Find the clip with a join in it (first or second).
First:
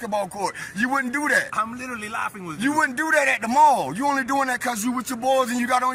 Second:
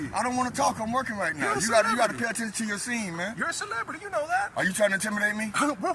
second